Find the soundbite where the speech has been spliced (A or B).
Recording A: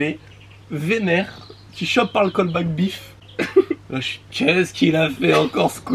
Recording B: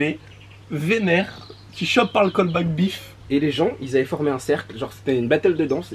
B